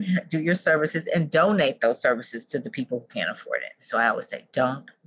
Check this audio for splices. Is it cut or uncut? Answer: cut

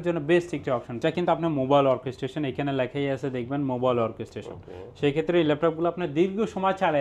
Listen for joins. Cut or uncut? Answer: cut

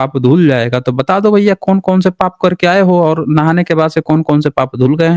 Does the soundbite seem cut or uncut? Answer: uncut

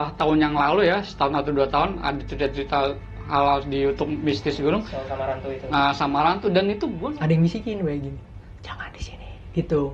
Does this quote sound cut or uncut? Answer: cut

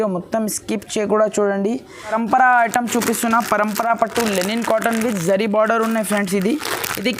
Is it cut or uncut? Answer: cut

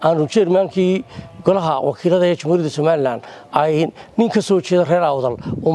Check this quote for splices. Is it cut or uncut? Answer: uncut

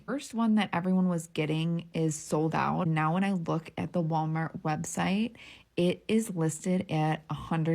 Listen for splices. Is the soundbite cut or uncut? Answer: cut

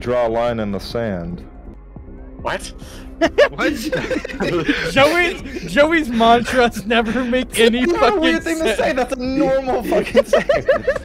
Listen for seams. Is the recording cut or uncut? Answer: cut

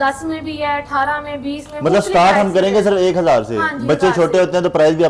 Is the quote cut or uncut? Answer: uncut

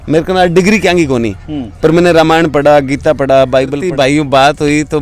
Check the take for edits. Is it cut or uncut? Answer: cut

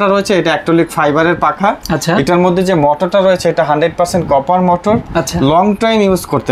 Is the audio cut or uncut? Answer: uncut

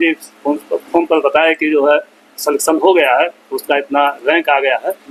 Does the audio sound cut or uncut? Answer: uncut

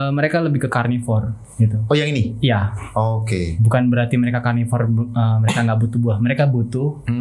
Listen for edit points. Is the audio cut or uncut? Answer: uncut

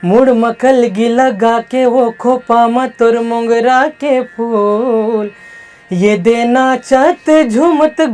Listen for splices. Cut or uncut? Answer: uncut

